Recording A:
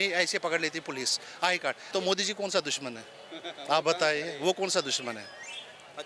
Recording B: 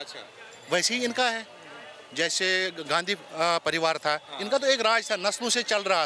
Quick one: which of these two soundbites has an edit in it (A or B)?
A